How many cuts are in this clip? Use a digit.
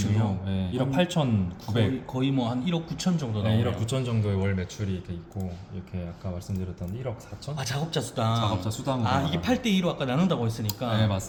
0